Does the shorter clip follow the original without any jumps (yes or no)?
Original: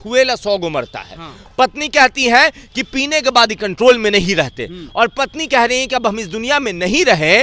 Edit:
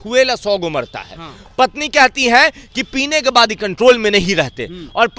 yes